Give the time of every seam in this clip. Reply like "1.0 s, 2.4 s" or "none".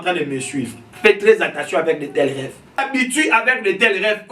2.9 s